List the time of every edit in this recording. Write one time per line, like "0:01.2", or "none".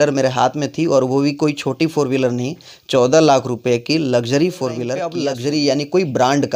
0:05.2